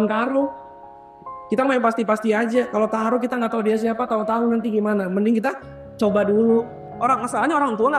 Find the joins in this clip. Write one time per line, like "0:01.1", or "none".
0:06.8